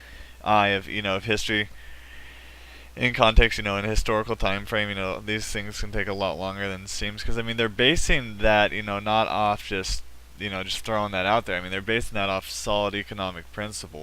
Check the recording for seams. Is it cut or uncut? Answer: cut